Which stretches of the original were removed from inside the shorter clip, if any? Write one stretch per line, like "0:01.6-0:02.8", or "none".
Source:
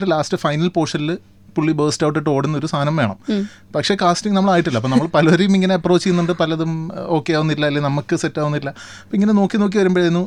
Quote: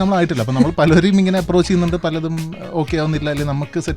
none